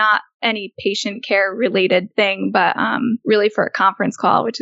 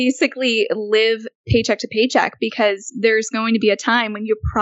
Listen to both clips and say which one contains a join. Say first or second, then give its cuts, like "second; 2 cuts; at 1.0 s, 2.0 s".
first; 2 cuts; at 2.1 s, 3.2 s